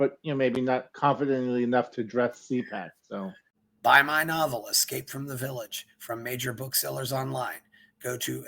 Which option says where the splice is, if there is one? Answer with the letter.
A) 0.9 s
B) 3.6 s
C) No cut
B